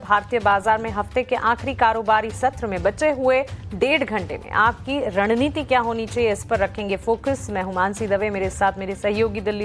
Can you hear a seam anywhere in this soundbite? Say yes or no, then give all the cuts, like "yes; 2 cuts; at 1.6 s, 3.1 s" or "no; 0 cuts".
no; 0 cuts